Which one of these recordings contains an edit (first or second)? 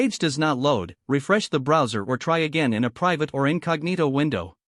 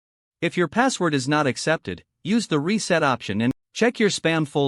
second